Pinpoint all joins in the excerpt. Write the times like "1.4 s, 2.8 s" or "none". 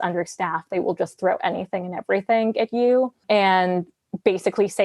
3.2 s